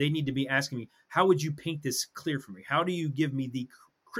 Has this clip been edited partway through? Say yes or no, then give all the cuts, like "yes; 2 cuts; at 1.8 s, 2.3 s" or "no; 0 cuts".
no; 0 cuts